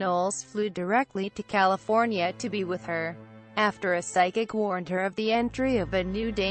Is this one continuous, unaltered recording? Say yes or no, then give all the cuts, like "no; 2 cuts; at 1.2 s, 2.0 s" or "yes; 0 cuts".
no; 1 cut; at 3.2 s